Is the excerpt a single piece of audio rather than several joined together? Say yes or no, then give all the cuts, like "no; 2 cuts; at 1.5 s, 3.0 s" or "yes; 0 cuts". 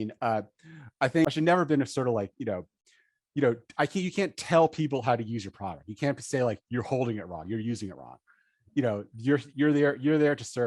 no; 1 cut; at 1.2 s